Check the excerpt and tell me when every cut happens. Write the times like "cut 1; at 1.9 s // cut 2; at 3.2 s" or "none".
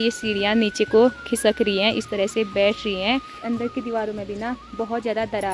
cut 1; at 3.3 s

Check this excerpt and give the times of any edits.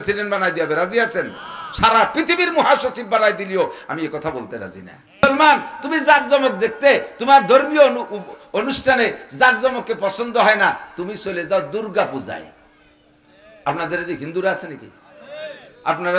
cut 1; at 5.2 s

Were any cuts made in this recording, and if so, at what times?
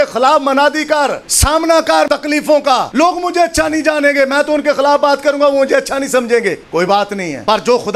cut 1; at 1.3 s // cut 2; at 2.4 s // cut 3; at 6.9 s

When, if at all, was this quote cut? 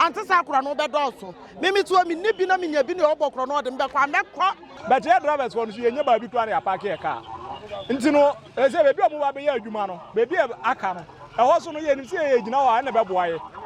cut 1; at 4.7 s

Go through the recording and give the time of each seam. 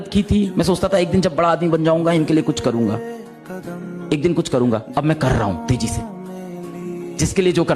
none

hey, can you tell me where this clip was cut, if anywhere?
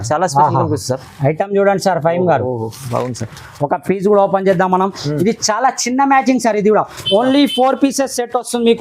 none

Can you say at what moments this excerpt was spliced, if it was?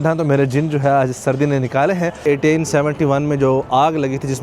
cut 1; at 2.2 s

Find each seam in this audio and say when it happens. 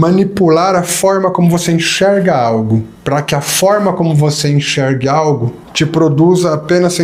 cut 1; at 2.9 s // cut 2; at 5.6 s

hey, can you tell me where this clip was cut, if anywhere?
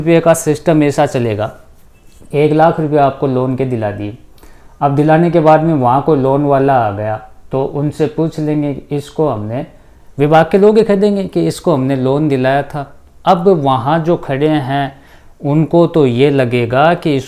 none

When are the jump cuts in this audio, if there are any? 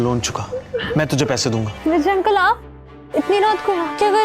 cut 1; at 1.7 s

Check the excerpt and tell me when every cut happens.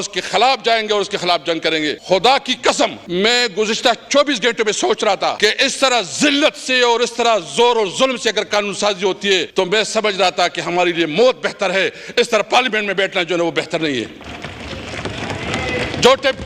cut 1; at 2.0 s // cut 2; at 3.0 s // cut 3; at 5.4 s // cut 4; at 9.5 s

